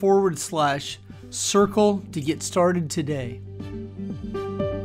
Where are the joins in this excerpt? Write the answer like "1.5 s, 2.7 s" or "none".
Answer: 3.4 s

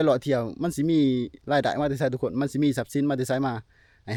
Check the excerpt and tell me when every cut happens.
none

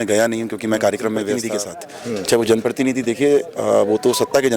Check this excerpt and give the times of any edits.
1.5 s

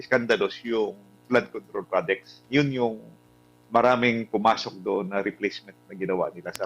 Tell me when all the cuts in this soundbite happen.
none

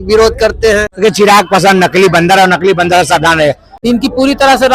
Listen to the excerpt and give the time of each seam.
0.9 s, 3.7 s

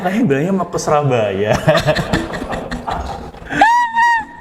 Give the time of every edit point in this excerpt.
none

